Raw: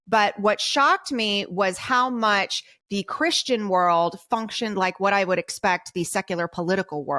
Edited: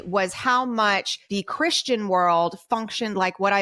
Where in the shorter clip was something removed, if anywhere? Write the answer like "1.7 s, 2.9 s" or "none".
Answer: 1.2 s